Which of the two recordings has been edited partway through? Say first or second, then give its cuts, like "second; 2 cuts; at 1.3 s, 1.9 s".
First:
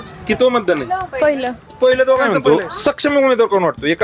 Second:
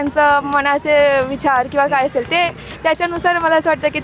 first; 1 cut; at 2.3 s